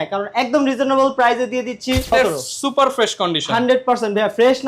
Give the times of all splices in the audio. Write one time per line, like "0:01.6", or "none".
0:02.1